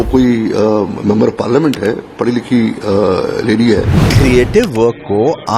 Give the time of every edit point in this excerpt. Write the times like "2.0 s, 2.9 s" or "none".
4.0 s